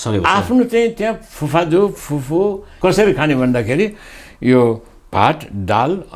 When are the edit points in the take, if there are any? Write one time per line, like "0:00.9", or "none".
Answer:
0:02.7